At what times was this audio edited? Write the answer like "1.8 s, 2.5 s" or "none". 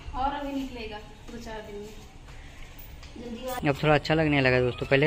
3.6 s